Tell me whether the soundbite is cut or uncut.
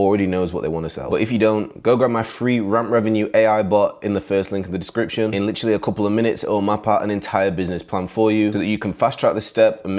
uncut